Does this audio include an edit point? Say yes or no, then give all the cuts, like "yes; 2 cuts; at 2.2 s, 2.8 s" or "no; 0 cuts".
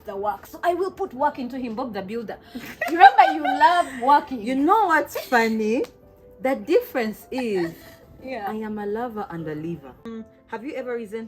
yes; 1 cut; at 10.1 s